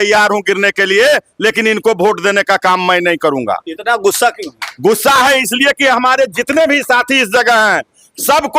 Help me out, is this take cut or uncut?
uncut